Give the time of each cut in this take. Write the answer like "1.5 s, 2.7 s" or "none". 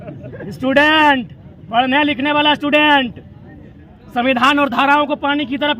none